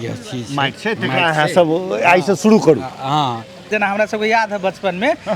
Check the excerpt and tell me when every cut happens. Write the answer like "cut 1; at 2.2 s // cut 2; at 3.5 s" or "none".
cut 1; at 3.7 s